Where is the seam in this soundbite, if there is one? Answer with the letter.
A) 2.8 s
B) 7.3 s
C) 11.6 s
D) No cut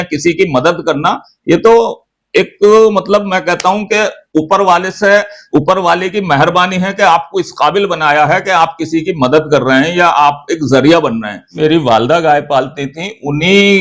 C